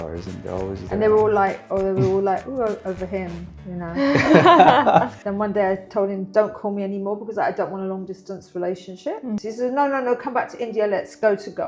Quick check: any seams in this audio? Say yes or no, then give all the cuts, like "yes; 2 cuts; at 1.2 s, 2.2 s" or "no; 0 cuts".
yes; 1 cut; at 5.2 s